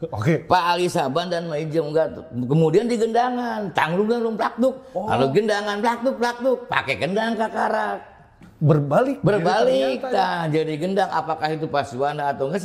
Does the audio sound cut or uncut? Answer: uncut